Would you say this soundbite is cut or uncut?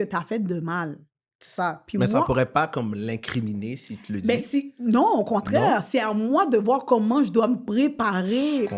uncut